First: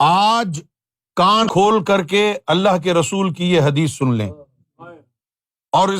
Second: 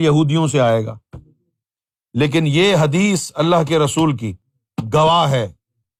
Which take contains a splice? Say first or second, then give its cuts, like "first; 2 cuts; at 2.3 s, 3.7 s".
first; 1 cut; at 1.5 s